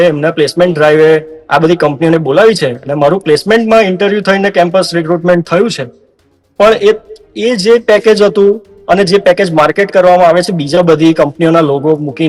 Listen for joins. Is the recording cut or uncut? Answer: uncut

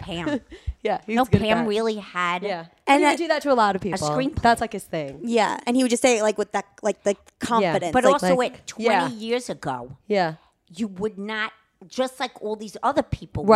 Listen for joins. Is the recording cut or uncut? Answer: cut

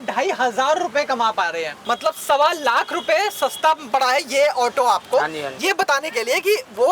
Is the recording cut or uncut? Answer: cut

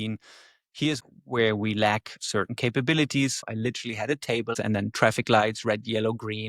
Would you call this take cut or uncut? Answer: cut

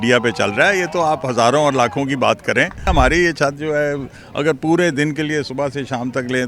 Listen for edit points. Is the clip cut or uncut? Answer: cut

